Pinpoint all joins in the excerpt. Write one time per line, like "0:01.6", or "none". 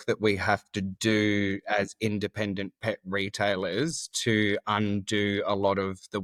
none